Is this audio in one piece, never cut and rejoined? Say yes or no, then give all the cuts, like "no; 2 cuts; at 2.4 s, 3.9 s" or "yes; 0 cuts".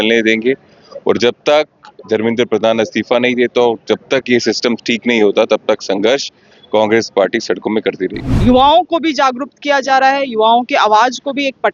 no; 1 cut; at 8.2 s